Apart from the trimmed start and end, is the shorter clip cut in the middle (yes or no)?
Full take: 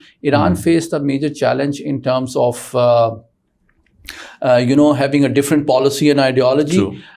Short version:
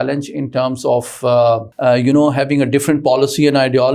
yes